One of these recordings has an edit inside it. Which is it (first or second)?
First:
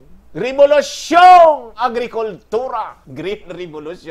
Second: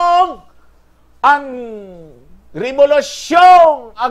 first